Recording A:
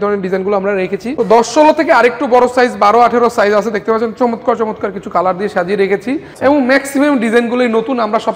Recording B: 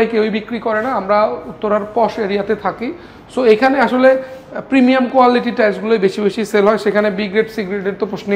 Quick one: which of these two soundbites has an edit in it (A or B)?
A